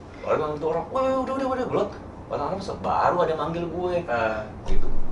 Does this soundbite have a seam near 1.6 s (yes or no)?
no